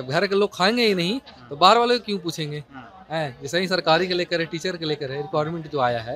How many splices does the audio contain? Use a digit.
0